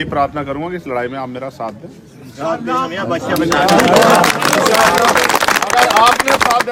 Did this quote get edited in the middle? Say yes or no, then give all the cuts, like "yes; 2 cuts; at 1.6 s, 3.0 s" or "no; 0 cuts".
no; 0 cuts